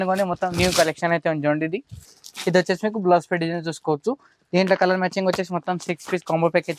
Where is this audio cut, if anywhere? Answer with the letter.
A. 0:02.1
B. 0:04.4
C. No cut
A